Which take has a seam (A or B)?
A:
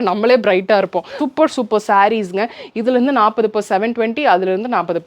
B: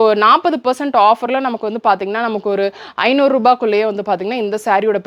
A